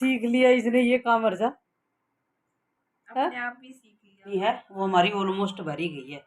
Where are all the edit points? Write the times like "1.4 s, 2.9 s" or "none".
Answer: 4.3 s